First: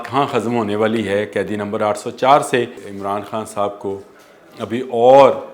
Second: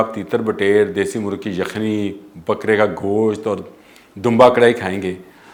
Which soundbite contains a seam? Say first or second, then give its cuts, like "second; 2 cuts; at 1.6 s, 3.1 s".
first; 1 cut; at 2.9 s